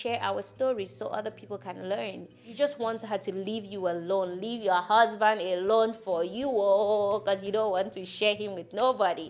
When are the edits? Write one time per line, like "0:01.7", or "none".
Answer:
0:02.4